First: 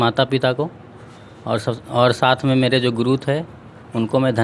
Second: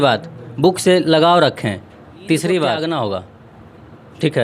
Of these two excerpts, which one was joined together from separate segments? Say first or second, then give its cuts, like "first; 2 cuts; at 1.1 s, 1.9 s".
second; 1 cut; at 2.9 s